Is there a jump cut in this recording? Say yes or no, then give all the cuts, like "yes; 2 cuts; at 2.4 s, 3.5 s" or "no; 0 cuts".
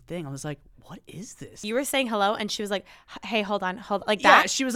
yes; 1 cut; at 1.6 s